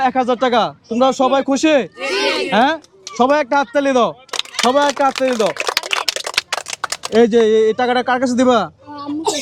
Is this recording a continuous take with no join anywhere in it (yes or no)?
yes